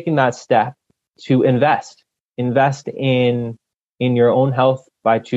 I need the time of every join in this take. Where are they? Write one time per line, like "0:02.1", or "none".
0:00.9